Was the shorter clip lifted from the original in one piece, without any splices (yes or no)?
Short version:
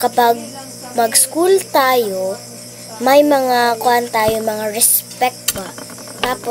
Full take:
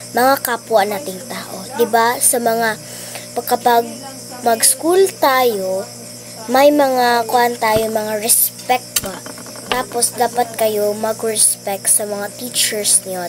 yes